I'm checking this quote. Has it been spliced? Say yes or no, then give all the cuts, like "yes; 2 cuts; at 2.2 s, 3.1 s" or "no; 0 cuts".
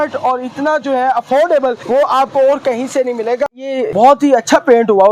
yes; 1 cut; at 3.5 s